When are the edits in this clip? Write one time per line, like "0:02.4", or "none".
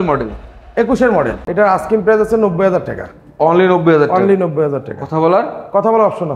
0:01.4